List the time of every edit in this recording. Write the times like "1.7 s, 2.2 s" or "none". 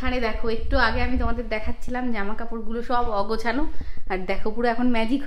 none